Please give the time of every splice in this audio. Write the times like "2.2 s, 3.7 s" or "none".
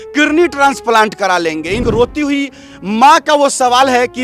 1.8 s

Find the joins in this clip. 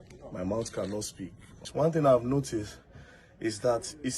1.6 s

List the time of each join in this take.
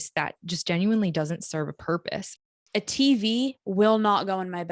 2.4 s

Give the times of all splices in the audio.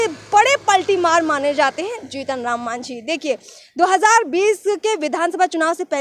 none

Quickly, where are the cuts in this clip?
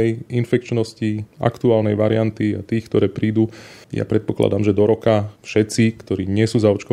none

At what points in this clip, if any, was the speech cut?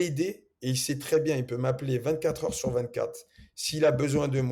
none

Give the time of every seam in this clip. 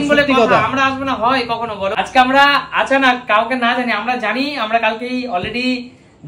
1.9 s

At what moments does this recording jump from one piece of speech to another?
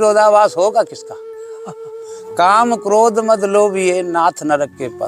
none

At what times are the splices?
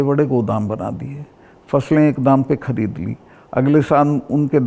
none

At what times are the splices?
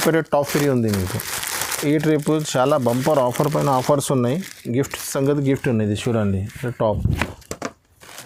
none

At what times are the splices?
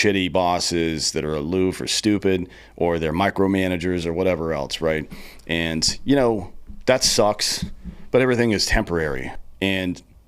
9.3 s

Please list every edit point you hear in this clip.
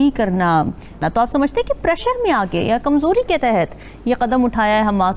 1.0 s

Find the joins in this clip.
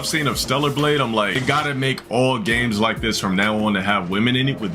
1.4 s

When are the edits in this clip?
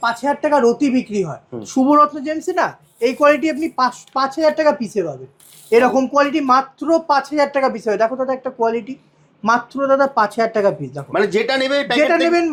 none

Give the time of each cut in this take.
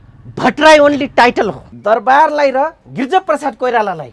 1.7 s

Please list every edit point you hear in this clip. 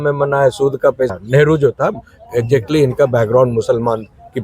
1.1 s

